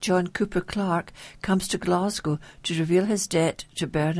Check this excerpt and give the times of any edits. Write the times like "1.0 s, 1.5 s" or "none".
none

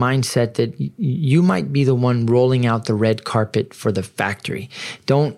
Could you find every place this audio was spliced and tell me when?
none

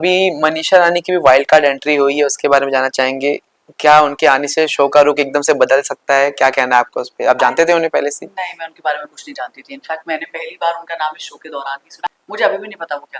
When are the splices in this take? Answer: 12.1 s

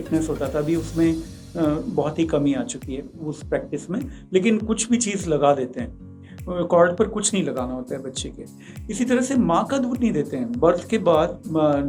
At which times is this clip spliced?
none

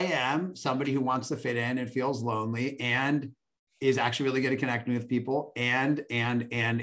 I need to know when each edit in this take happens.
none

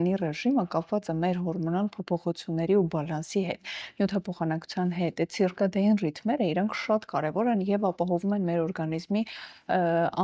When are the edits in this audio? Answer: none

